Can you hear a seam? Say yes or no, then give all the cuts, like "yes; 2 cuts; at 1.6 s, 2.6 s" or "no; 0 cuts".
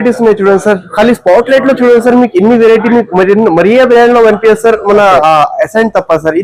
no; 0 cuts